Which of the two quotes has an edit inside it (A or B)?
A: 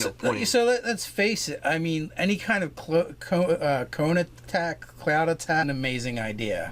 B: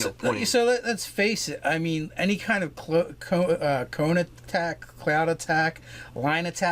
B